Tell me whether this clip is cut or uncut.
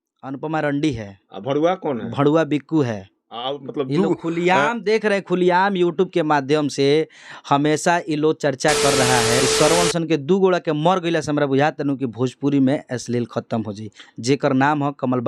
cut